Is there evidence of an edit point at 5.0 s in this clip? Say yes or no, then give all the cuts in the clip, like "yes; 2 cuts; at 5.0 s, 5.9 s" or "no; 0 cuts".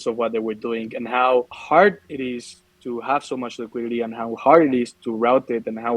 no; 1 cut; at 1.6 s